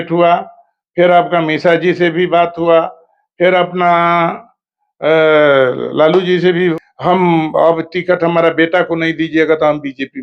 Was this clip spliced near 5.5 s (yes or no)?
no